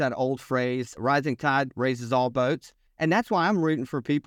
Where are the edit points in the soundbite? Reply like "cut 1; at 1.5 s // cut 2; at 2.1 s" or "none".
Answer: cut 1; at 0.9 s // cut 2; at 2.9 s